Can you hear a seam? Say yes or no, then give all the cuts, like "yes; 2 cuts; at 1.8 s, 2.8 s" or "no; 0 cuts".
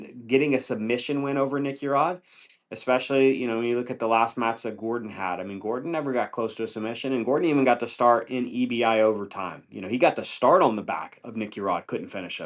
no; 0 cuts